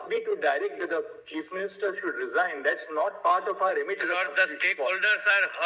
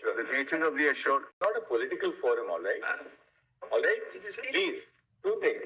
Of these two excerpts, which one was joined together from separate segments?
second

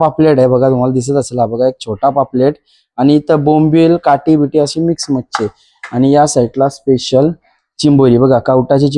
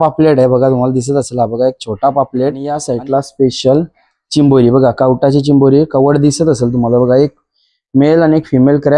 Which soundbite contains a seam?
second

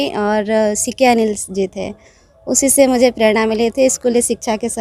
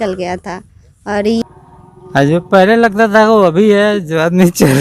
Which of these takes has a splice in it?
second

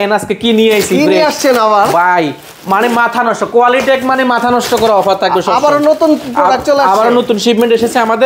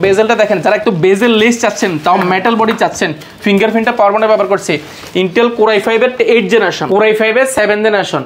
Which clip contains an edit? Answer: second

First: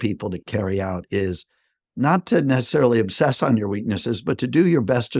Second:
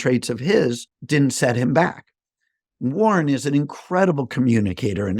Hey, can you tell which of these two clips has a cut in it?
second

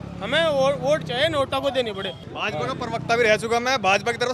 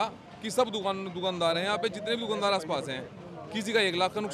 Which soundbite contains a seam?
first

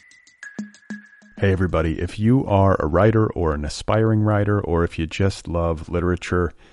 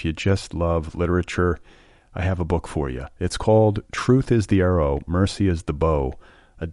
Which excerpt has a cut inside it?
first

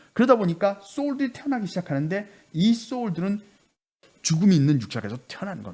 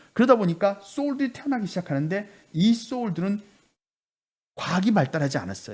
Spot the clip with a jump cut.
first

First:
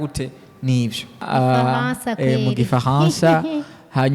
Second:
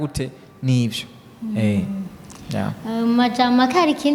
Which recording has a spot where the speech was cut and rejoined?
first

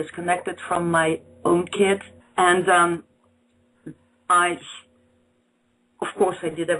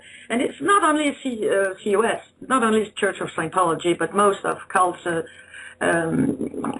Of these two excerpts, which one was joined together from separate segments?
first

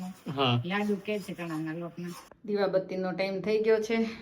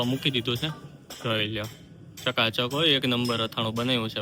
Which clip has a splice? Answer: first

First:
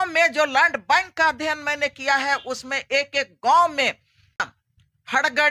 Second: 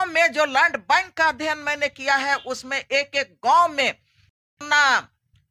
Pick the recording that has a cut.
first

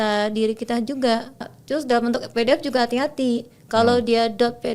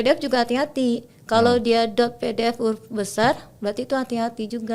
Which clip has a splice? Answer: first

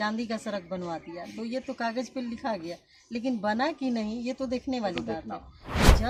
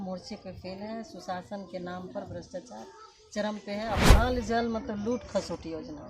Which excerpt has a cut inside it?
second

